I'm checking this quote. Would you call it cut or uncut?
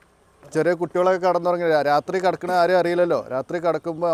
uncut